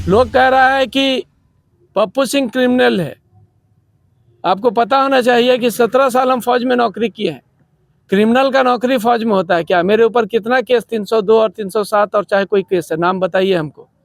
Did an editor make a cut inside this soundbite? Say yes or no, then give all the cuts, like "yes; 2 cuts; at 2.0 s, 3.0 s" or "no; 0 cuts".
no; 0 cuts